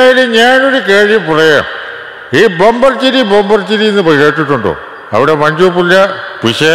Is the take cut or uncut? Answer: uncut